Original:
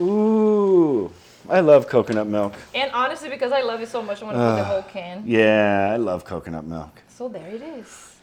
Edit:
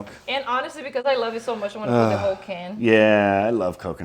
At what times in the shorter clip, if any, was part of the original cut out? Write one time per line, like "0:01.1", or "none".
none